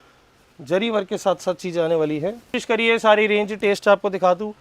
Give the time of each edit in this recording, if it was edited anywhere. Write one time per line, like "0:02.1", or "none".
0:02.6